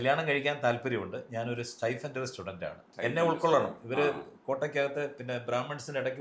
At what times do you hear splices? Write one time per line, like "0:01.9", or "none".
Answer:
0:02.9